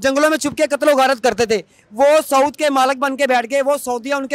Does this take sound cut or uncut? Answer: uncut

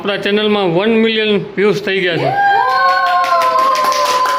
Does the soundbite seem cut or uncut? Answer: uncut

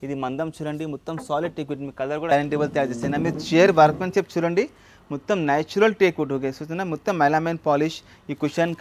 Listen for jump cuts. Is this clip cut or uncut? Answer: cut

